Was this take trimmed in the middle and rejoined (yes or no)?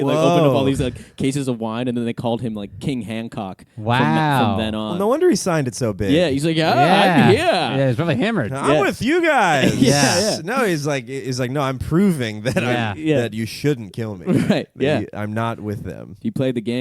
no